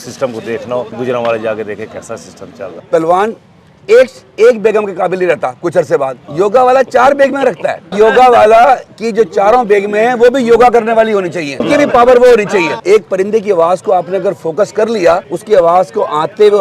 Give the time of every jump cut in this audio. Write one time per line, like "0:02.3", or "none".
0:00.9
0:02.7
0:06.2
0:07.9
0:09.0
0:11.6
0:12.8
0:15.3